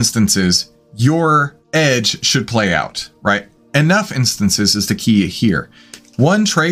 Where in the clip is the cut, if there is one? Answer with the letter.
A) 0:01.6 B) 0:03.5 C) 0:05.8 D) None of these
A